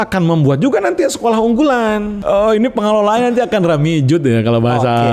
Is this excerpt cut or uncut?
cut